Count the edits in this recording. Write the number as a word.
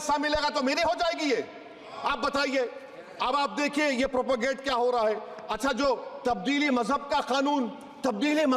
zero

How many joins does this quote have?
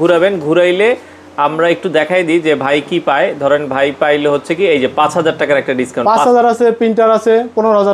zero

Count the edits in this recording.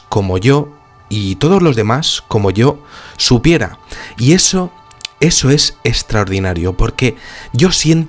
one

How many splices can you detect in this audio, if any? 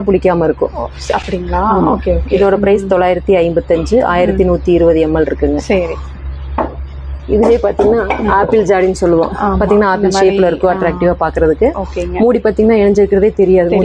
zero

